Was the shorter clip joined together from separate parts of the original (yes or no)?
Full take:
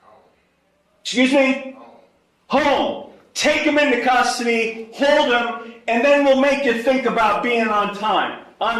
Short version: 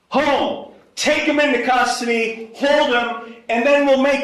no